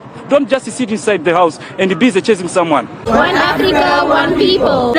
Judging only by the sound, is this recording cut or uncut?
cut